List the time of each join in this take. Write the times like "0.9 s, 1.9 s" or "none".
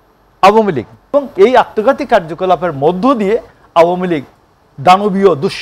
1.1 s

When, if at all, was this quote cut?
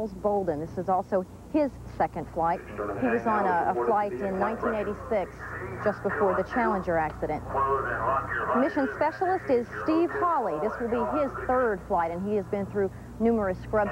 none

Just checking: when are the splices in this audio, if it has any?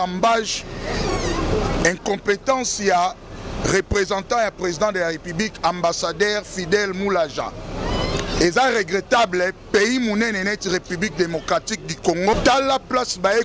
12.3 s

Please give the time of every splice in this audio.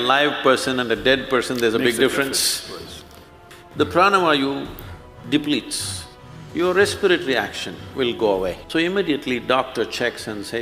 3.4 s, 8.6 s

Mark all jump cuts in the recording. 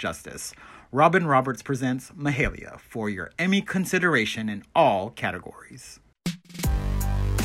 6.1 s

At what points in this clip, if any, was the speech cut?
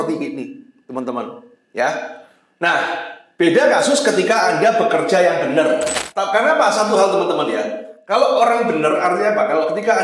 6.0 s

